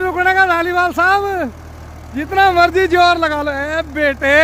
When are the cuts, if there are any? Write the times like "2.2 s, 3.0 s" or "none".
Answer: none